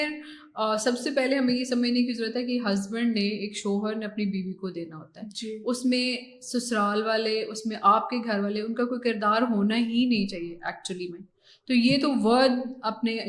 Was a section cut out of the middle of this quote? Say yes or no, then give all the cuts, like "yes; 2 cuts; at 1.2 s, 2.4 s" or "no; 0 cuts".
no; 0 cuts